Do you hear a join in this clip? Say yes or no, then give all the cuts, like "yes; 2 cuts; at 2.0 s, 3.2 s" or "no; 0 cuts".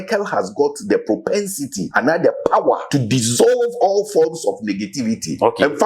yes; 2 cuts; at 1.8 s, 2.8 s